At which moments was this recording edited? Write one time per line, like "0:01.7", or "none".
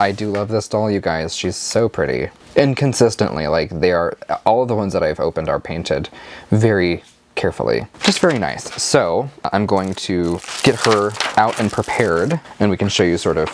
none